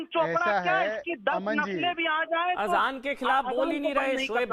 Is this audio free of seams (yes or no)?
yes